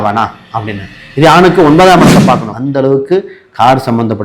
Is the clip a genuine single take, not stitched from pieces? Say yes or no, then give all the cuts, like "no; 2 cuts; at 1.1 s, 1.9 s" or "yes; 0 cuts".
no; 1 cut; at 2.6 s